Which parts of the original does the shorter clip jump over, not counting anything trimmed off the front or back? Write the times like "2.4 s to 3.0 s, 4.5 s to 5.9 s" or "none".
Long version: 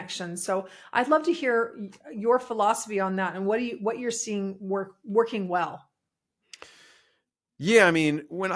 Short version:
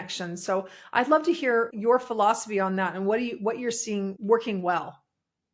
1.7 s to 2.1 s, 4.5 s to 5.0 s